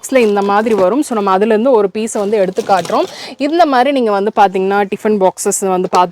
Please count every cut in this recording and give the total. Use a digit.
0